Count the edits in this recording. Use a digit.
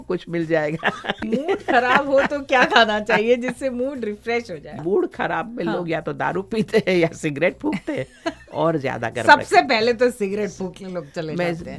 2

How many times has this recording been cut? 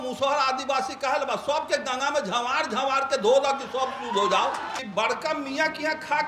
1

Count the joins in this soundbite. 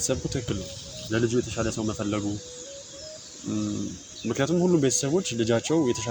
0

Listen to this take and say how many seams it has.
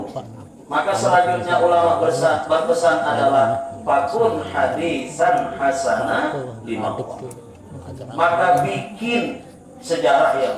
0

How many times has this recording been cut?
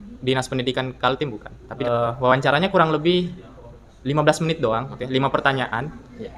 2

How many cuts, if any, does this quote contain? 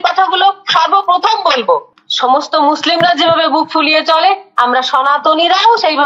1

